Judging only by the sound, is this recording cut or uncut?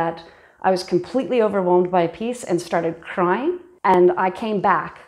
cut